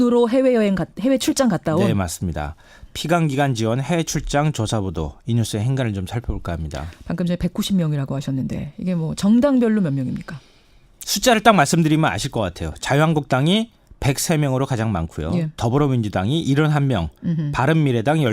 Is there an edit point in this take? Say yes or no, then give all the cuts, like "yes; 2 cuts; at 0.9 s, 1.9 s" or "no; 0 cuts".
yes; 1 cut; at 14.8 s